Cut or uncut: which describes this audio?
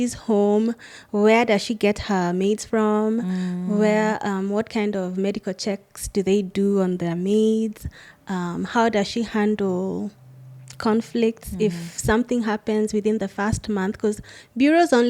uncut